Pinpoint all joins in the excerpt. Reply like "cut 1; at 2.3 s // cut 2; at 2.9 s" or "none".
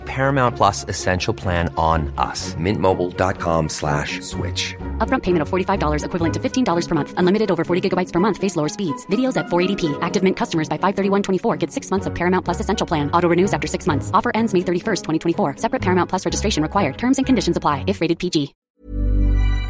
cut 1; at 18.6 s